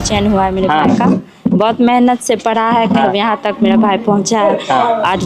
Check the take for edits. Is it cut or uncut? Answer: cut